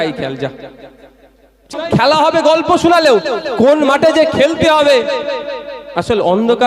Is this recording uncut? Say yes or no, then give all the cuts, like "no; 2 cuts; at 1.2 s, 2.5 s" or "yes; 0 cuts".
no; 1 cut; at 1.7 s